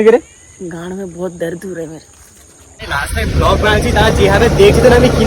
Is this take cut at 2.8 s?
yes; 1 cut; at 2.8 s

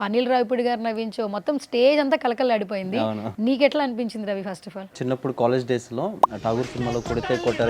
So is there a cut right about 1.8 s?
no; 2 cuts; at 3.3 s, 5.0 s

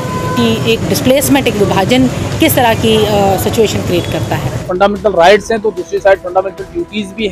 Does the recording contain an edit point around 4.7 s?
yes; 1 cut; at 4.7 s

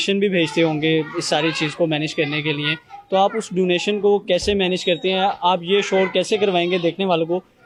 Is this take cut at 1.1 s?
no; 0 cuts

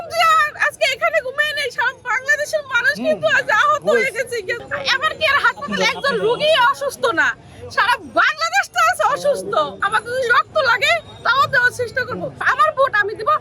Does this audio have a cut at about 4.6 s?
yes; 3 cuts; at 4.6 s, 9.8 s, 12.4 s

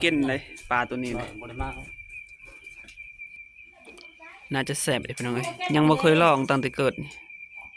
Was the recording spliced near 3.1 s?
yes; 1 cut; at 3.1 s

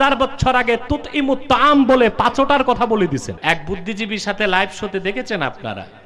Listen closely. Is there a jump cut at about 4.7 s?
no; 1 cut; at 3.3 s

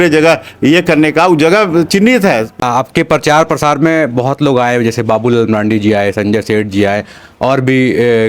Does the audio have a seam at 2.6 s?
yes; 1 cut; at 2.6 s

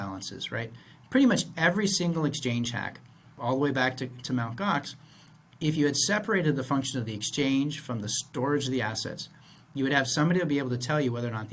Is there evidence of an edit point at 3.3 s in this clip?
yes; 1 cut; at 3.3 s

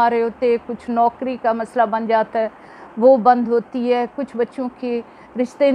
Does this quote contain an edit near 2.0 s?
no; 0 cuts

